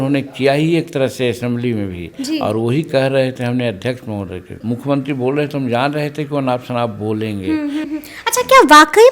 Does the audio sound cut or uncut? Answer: cut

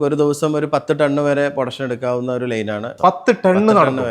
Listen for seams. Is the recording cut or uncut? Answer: cut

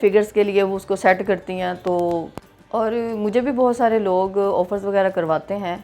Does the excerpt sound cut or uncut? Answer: cut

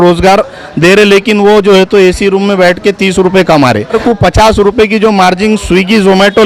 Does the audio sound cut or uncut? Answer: cut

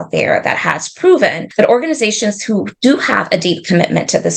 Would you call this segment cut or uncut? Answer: cut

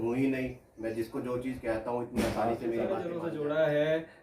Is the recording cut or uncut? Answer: cut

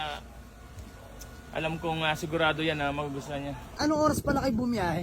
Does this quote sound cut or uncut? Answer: cut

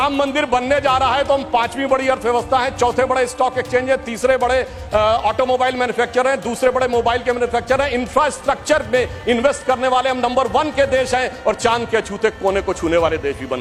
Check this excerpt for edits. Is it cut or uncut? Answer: uncut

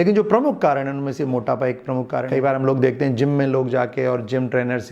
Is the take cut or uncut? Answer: cut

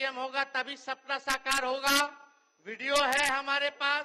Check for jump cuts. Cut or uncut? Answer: uncut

